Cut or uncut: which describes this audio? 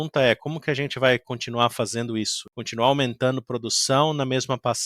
cut